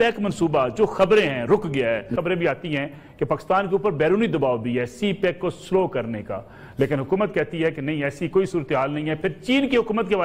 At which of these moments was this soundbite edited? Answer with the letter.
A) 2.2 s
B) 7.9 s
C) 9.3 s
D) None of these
A